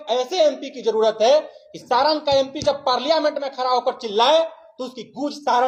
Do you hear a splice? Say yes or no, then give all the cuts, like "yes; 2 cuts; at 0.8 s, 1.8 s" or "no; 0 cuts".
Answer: no; 0 cuts